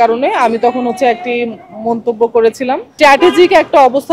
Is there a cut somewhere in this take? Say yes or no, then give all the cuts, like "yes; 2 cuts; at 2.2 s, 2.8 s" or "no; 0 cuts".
yes; 1 cut; at 2.9 s